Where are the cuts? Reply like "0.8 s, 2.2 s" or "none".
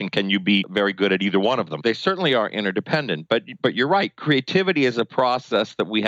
1.8 s